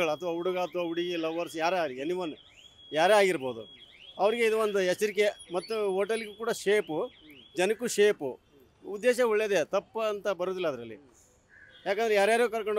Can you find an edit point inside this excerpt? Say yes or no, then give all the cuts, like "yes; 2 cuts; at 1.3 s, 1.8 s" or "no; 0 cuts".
no; 0 cuts